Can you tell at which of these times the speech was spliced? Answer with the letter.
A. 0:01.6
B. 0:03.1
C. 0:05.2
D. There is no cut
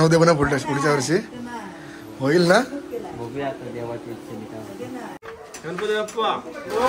C